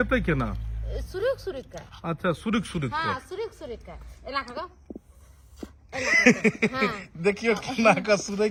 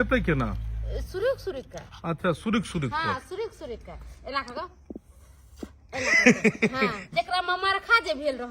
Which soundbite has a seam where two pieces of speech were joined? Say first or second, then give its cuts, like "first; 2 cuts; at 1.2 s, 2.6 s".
second; 1 cut; at 7.1 s